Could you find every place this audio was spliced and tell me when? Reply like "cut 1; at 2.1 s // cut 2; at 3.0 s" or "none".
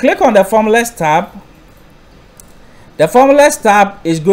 none